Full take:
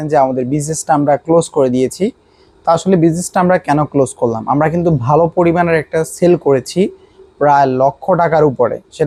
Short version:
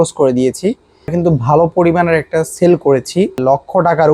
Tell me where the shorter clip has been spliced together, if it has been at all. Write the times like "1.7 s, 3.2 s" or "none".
1.1 s, 3.4 s